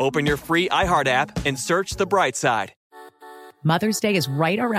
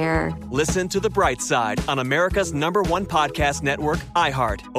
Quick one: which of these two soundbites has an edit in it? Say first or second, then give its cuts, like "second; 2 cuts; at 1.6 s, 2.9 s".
first; 1 cut; at 2.8 s